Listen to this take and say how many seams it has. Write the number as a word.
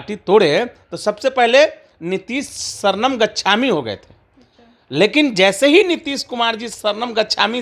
zero